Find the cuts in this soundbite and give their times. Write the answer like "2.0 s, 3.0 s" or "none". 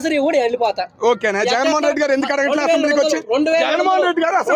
none